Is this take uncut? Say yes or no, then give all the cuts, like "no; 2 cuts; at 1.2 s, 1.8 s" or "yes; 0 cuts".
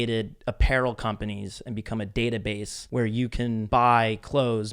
no; 2 cuts; at 2.7 s, 3.6 s